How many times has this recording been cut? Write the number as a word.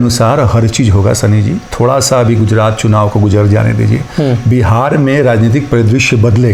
zero